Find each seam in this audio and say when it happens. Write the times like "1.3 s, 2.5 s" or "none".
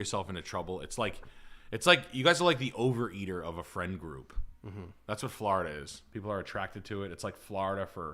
6.0 s